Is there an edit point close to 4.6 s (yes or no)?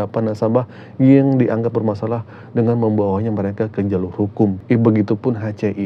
yes